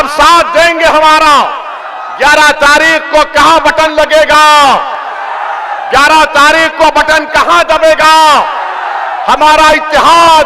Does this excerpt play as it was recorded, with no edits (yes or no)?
yes